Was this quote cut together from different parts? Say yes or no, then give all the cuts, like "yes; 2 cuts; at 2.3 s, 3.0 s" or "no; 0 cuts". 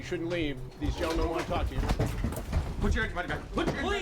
yes; 1 cut; at 2.4 s